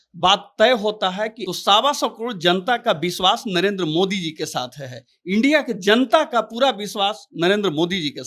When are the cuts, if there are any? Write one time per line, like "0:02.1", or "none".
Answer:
0:01.4